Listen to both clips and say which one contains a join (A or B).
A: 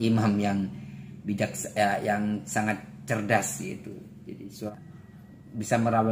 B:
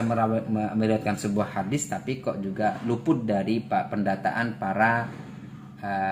A